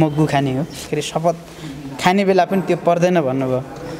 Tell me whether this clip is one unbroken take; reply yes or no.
no